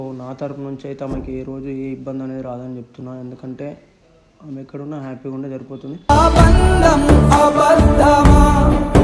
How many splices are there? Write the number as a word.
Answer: zero